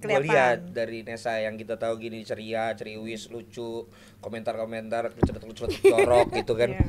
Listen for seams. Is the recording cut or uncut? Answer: uncut